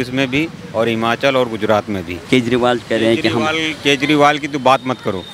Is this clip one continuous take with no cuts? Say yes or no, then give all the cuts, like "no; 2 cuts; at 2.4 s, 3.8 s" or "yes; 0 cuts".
no; 1 cut; at 2.2 s